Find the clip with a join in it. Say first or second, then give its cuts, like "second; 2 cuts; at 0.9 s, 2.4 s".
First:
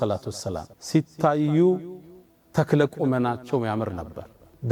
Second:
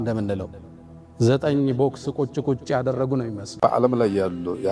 second; 1 cut; at 3.4 s